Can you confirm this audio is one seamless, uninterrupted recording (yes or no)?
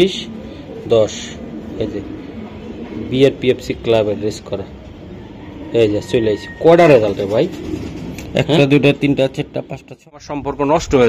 no